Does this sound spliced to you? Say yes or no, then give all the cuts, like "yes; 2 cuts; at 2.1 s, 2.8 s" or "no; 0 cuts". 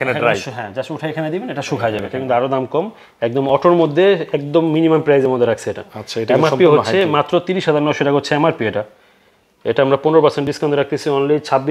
yes; 1 cut; at 2.1 s